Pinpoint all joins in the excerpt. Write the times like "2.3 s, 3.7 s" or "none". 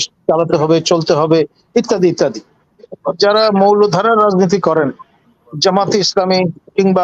2.9 s